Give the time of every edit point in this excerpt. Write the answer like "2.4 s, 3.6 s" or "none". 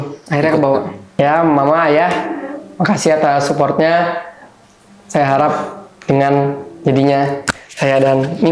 1.0 s